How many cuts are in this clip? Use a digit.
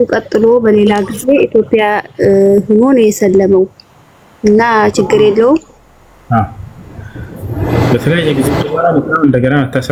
0